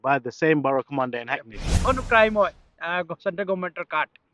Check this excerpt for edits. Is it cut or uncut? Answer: cut